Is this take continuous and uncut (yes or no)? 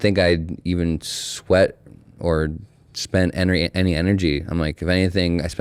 yes